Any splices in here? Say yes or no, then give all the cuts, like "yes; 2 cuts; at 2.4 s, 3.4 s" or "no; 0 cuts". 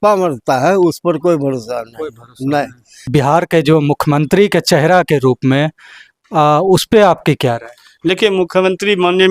yes; 1 cut; at 3.0 s